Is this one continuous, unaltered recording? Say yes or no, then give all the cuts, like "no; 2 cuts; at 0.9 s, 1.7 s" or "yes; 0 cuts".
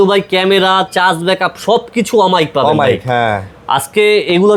yes; 0 cuts